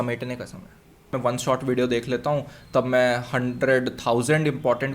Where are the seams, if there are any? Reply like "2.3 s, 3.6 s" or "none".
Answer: 1.1 s

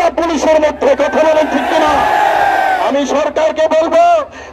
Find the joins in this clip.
none

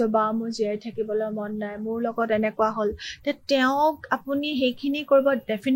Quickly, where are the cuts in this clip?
none

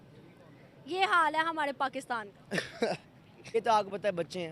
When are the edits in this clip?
3.5 s

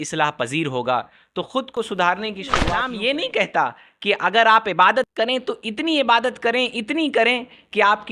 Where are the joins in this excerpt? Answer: 2.7 s

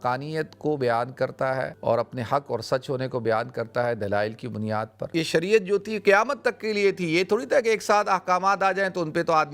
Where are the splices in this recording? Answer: 1.7 s, 5.1 s

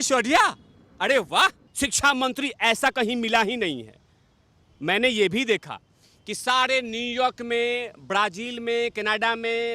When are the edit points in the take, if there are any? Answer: 1.6 s

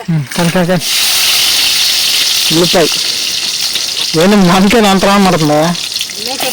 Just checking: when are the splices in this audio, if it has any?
1.0 s

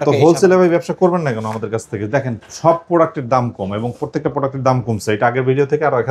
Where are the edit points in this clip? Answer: none

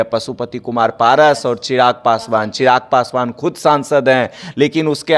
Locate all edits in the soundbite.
none

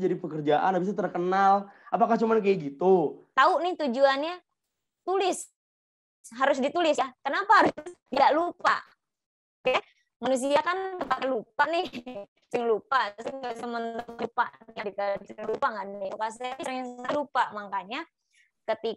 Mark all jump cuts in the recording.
3.2 s

